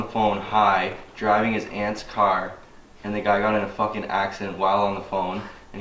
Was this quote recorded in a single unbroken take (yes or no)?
yes